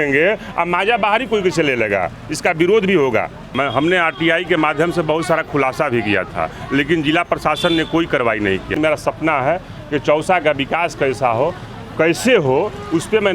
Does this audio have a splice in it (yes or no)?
yes